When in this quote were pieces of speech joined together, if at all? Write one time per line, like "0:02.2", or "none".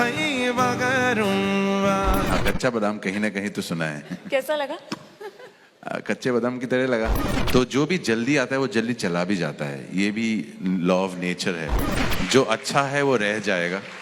0:02.3
0:07.2
0:11.8